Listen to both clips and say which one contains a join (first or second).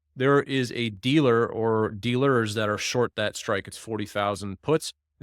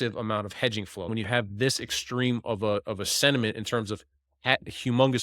second